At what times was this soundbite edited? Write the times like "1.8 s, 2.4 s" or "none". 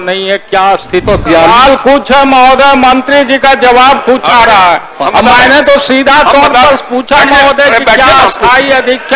1.0 s